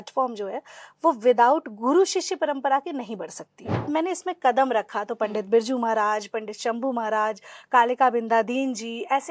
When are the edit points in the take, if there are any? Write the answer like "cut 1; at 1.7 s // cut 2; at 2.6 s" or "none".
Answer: cut 1; at 3.9 s